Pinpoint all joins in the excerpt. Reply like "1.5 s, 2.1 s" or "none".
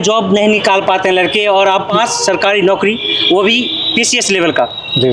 1.9 s